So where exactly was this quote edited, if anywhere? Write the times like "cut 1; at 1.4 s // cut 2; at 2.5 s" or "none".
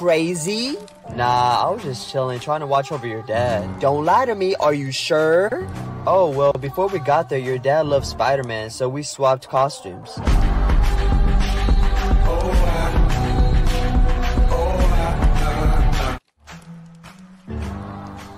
cut 1; at 16.4 s